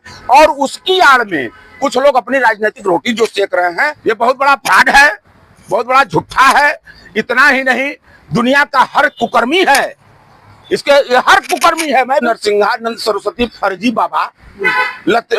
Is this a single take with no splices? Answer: no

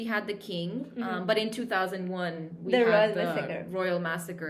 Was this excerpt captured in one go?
yes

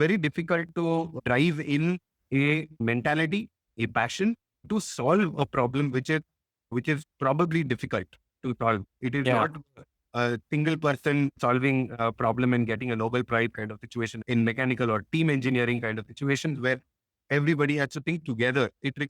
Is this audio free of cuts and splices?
yes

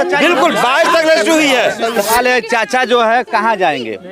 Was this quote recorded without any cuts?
no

